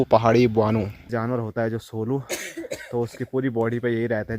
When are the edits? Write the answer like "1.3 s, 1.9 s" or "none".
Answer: 1.1 s

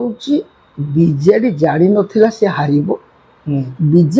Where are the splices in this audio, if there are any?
none

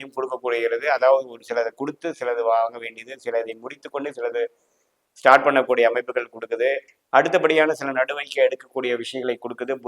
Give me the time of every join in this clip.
6.9 s

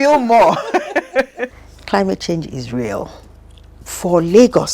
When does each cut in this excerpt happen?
1.7 s, 3.7 s

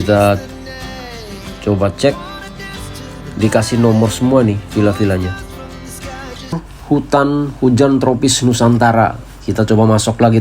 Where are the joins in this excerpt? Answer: 6.7 s

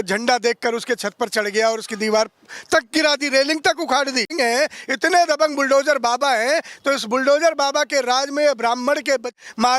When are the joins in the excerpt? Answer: 4.3 s

